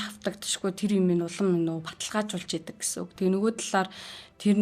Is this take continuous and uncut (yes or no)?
yes